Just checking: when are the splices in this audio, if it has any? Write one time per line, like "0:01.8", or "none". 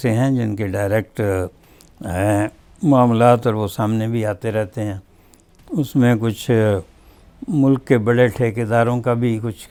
none

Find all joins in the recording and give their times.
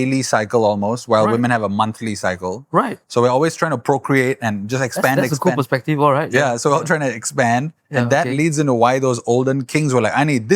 none

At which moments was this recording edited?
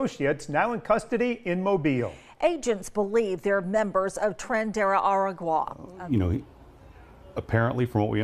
0:05.8

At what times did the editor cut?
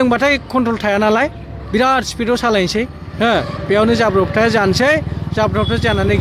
none

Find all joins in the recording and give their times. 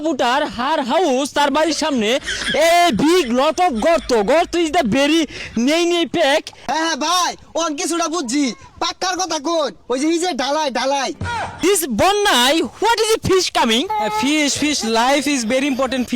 0:06.6
0:11.6

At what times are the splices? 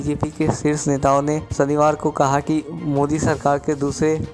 0:01.5

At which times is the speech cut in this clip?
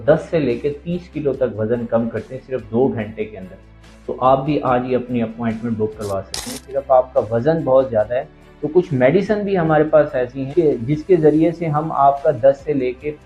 0:06.4

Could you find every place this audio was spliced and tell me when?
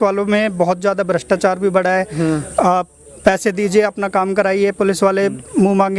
none

